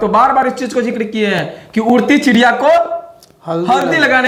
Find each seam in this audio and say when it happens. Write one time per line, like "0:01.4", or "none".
none